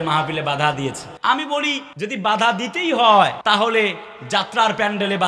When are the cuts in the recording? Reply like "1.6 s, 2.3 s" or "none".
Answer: 1.1 s, 1.9 s, 3.4 s